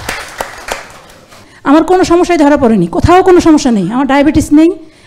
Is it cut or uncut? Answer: cut